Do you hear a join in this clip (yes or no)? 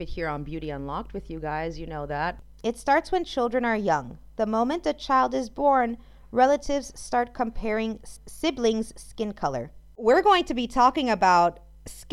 yes